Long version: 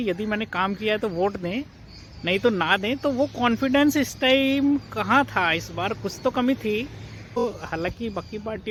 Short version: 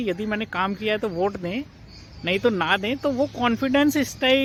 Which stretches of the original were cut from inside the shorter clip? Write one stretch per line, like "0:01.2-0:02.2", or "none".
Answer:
none